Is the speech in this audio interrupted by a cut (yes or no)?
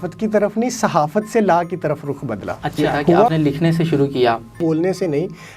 yes